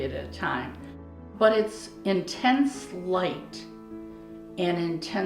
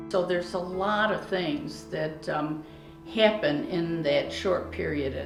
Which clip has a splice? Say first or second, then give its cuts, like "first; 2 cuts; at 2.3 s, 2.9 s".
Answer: first; 1 cut; at 1.3 s